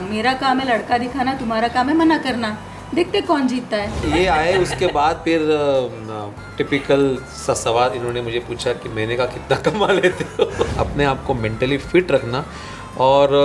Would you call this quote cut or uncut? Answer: cut